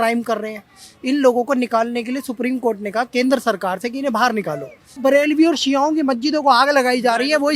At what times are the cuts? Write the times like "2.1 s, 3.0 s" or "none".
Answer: 5.0 s